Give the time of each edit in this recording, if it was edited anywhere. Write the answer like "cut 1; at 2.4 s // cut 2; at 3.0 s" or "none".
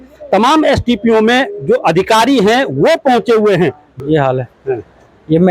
cut 1; at 3.9 s